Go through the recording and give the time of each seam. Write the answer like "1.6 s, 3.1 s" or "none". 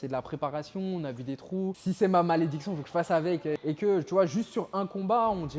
1.8 s, 3.6 s